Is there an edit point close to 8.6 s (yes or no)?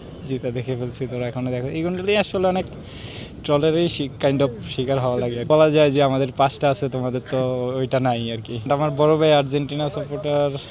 yes